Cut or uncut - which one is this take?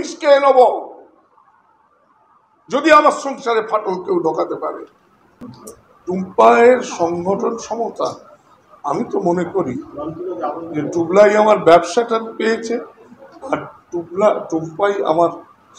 uncut